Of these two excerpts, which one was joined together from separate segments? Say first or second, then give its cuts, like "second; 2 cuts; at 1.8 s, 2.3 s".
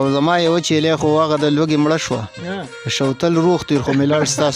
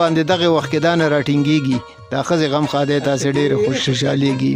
first; 1 cut; at 1.0 s